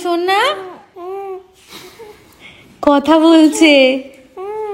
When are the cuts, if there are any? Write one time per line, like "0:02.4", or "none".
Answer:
none